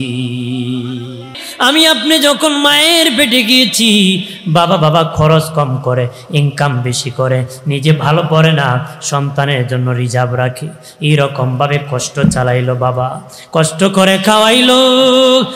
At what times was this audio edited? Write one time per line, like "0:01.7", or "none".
0:01.4